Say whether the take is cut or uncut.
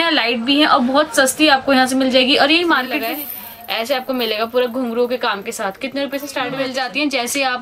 cut